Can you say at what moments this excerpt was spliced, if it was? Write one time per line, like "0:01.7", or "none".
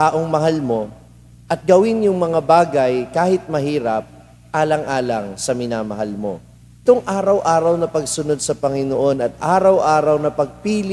0:06.8